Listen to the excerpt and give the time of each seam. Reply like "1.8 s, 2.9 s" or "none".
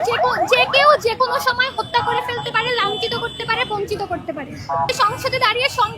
4.9 s